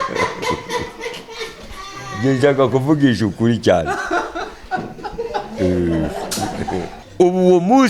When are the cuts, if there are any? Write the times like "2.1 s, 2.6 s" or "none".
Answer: 6.9 s